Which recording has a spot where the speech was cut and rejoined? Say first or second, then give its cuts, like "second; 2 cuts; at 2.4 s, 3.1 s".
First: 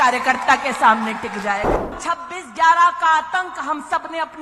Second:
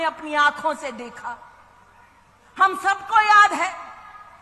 first; 1 cut; at 2.0 s